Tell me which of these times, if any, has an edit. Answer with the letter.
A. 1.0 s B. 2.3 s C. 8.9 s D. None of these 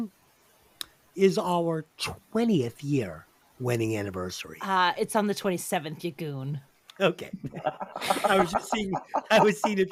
D